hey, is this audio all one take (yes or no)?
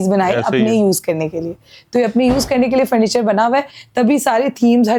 yes